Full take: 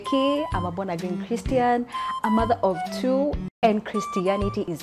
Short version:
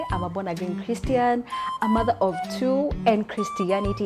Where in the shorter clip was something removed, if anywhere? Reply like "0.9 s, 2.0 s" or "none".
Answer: 3.0 s